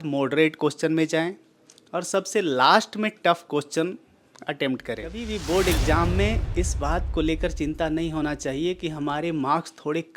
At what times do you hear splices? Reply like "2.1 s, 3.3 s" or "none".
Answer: 5.2 s